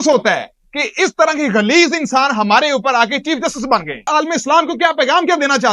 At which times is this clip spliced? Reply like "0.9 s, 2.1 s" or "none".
4.1 s

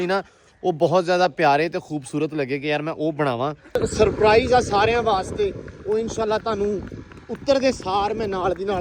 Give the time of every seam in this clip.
3.8 s

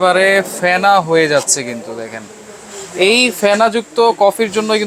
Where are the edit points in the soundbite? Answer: none

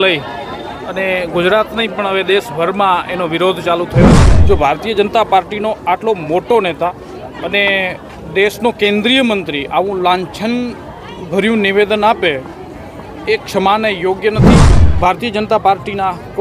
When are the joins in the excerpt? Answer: 4.2 s, 14.6 s

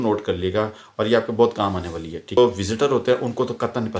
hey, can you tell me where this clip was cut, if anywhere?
2.4 s

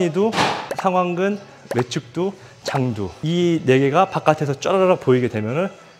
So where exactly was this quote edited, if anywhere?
3.2 s

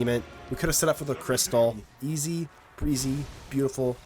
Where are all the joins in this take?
1.9 s

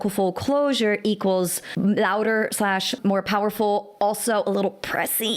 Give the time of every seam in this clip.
1.6 s, 3.0 s

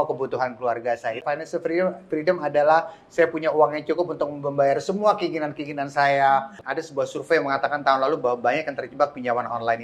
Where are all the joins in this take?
1.2 s, 6.6 s

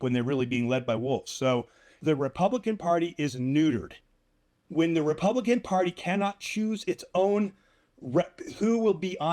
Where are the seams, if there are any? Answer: 2.0 s

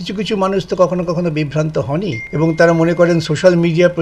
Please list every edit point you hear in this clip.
2.2 s

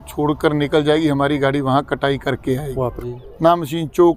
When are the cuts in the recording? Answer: 3.1 s

